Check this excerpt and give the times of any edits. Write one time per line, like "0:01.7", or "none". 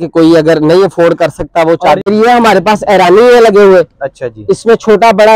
0:02.0